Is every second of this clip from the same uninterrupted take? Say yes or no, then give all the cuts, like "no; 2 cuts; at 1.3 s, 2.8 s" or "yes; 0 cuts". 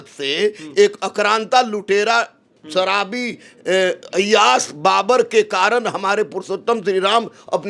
yes; 0 cuts